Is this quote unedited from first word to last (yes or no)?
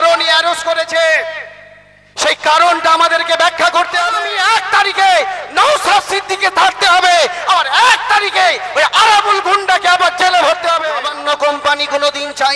no